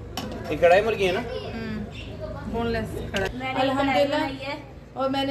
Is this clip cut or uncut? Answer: cut